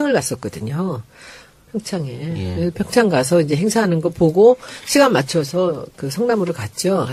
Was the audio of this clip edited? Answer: no; 0 cuts

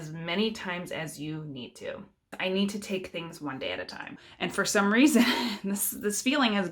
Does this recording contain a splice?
yes; 2 cuts; at 2.3 s, 4.3 s

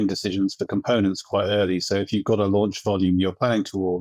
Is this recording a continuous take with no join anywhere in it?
yes; 0 cuts

